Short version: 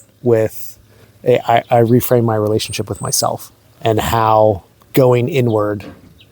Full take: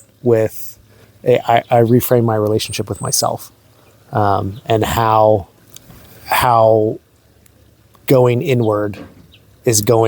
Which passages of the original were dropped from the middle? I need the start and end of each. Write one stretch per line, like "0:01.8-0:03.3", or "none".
0:03.7-0:04.5
0:05.6-0:07.9